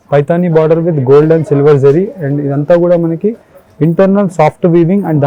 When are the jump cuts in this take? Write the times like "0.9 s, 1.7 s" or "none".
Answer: none